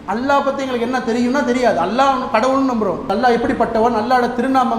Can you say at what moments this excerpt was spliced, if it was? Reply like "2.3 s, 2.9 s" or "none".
3.1 s